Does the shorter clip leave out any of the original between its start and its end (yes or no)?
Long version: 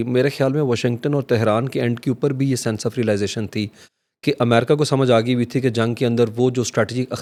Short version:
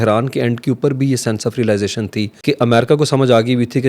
yes